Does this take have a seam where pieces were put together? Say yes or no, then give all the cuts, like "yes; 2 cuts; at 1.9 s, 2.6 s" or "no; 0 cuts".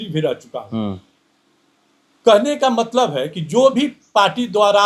no; 0 cuts